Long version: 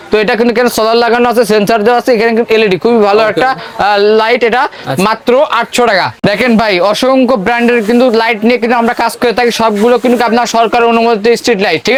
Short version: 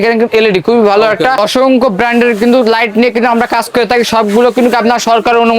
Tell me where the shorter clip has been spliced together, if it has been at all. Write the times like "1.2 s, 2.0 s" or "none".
1.4 s